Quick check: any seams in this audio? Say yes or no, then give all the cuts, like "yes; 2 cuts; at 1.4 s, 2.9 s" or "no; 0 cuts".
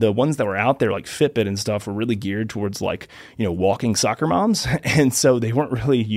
no; 0 cuts